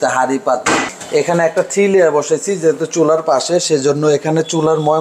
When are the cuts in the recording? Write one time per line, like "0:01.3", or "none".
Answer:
0:00.9